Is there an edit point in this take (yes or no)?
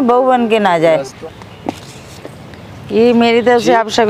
yes